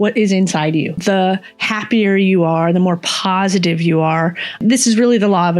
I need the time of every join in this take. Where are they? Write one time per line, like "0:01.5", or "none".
0:01.0
0:04.6